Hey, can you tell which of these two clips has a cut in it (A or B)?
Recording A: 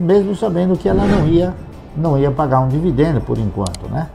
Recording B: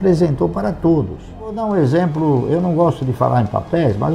B